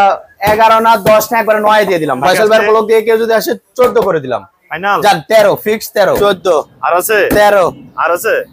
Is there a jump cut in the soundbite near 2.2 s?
yes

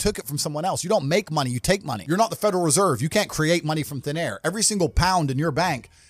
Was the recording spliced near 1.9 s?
yes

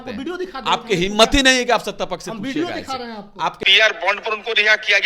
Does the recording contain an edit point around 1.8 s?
no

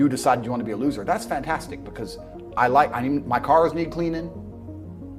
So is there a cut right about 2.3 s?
no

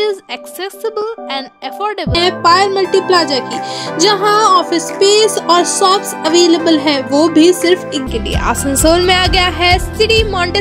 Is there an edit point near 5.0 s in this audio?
no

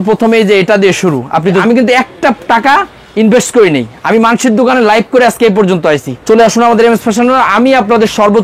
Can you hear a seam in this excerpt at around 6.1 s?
yes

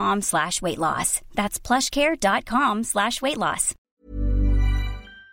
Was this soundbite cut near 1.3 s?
no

